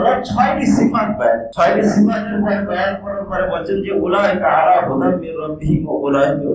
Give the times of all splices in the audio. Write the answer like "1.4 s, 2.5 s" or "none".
none